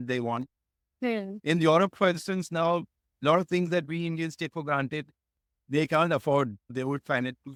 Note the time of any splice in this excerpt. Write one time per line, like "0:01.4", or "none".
none